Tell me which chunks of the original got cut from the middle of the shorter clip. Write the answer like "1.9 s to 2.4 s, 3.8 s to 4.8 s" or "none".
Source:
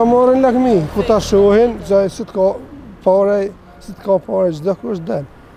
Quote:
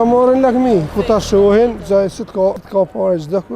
2.6 s to 4.0 s